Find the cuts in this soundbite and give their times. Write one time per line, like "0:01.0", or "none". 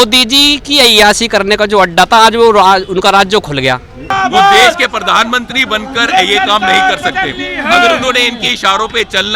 0:04.1